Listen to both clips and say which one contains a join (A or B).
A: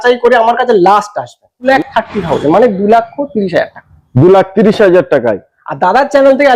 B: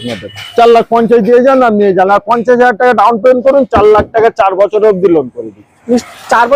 A